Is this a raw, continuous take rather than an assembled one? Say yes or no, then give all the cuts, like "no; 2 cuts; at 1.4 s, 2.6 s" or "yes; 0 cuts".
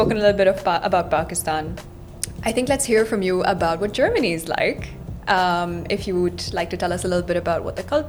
yes; 0 cuts